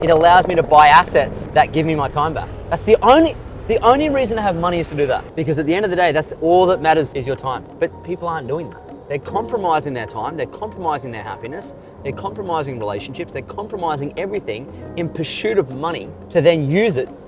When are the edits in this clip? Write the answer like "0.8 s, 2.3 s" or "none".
1.4 s, 5.3 s, 7.7 s, 16.1 s